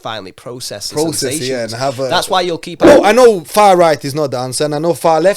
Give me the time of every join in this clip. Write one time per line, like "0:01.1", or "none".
0:02.9